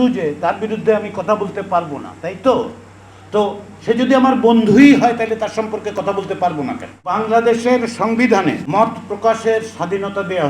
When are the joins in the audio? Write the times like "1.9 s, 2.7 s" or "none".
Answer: 7.1 s, 8.6 s